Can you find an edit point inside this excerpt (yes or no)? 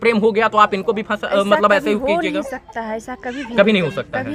no